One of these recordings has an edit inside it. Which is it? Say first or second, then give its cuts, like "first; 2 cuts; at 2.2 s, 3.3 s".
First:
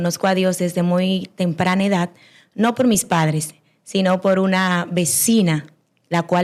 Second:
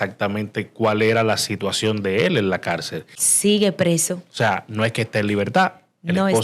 second; 1 cut; at 3.2 s